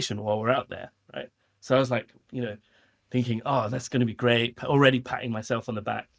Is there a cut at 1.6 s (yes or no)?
no